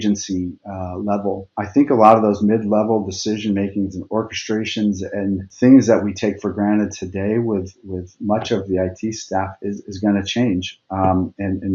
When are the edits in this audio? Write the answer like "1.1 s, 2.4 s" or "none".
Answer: 1.6 s, 5.5 s